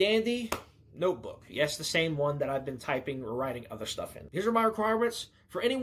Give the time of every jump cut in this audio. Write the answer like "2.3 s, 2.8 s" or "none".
none